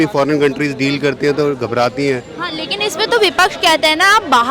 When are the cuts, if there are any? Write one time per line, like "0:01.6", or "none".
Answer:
none

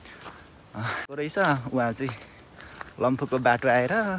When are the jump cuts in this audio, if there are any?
0:01.1

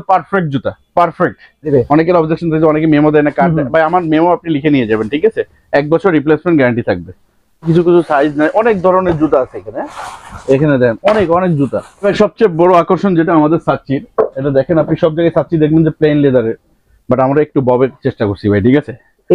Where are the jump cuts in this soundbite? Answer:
0:01.7
0:07.7
0:12.0

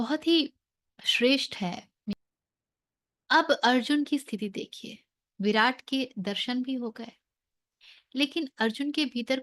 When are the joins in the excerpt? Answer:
0:02.1

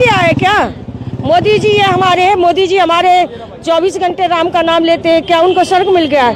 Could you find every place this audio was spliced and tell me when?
none

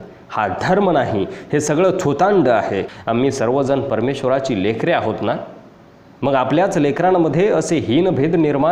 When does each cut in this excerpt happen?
0:02.9

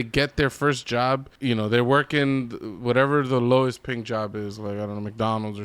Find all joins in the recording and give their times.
0:01.3

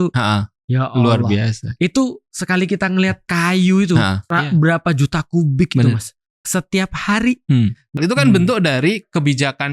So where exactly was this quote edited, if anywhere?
0:03.2
0:04.2
0:06.3
0:07.9

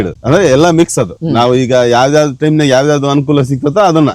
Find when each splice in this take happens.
0:01.1

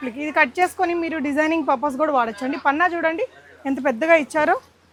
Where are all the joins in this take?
none

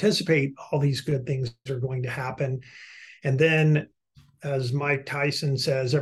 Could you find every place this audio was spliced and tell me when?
none

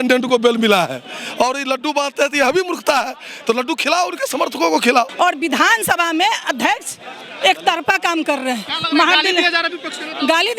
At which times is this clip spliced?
0:05.1

